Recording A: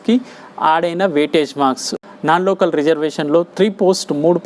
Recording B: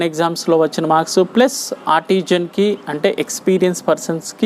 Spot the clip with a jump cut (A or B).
A